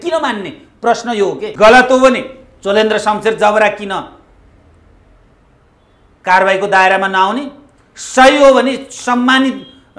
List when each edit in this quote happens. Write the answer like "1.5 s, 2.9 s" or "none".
1.5 s